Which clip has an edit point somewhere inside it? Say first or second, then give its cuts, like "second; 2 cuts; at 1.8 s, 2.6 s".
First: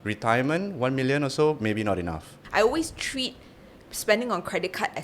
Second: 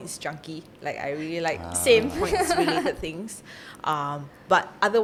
first; 1 cut; at 2.3 s